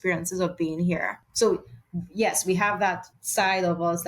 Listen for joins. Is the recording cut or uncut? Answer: cut